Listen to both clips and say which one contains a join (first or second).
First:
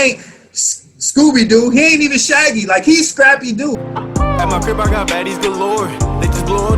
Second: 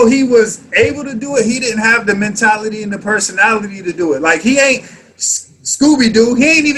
first